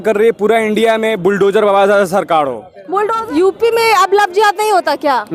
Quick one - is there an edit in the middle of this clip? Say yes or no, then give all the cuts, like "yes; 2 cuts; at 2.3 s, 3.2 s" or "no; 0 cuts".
yes; 1 cut; at 3.1 s